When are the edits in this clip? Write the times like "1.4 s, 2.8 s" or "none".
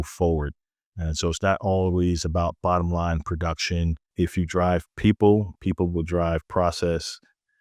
4.0 s